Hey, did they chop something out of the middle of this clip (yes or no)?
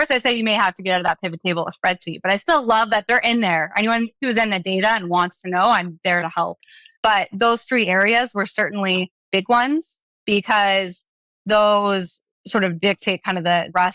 no